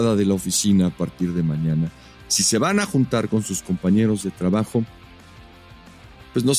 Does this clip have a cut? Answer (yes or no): no